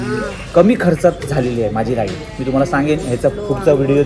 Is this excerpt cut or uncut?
uncut